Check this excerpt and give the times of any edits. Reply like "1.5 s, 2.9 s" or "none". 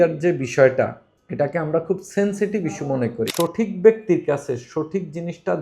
3.3 s